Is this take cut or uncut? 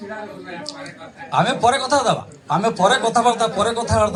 uncut